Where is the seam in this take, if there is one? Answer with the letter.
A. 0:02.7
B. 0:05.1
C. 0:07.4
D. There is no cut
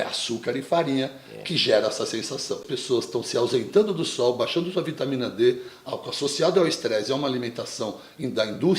A